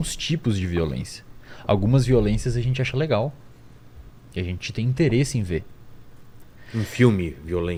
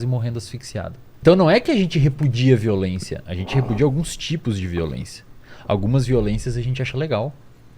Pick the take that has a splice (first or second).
second